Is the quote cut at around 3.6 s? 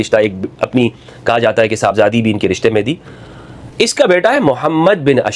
no; 0 cuts

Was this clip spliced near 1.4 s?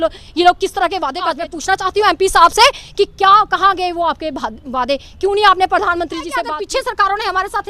yes; 2 cuts; at 1.4 s, 6.5 s

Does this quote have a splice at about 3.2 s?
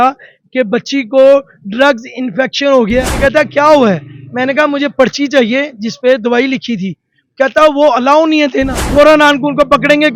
yes; 2 cuts; at 3.2 s, 8.9 s

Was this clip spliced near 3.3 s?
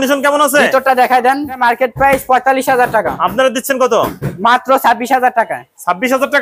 no; 1 cut; at 1.6 s

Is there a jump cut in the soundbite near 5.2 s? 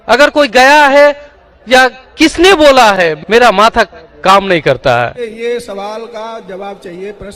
yes; 1 cut; at 5.2 s

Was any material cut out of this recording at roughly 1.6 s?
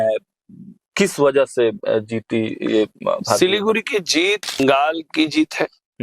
no; 1 cut; at 4.6 s

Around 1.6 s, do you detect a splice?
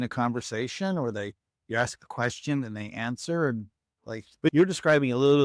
no; 1 cut; at 4.5 s

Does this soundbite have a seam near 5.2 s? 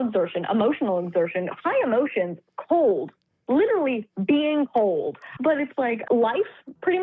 yes; 1 cut; at 5.2 s

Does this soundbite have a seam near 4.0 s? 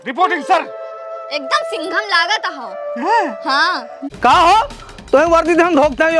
yes; 1 cut; at 4.0 s

